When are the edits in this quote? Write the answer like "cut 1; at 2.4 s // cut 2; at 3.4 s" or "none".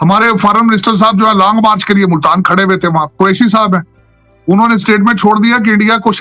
cut 1; at 3.1 s